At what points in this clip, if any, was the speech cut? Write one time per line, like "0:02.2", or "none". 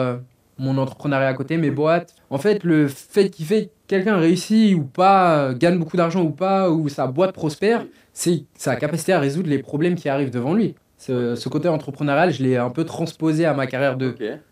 0:02.1
0:10.8